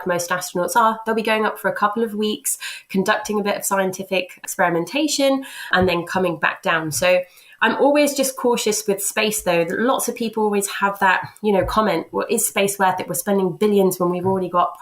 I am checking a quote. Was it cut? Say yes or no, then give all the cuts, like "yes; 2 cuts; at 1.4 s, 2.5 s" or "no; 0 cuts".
yes; 1 cut; at 7.4 s